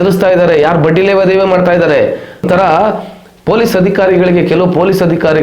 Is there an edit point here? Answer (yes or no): yes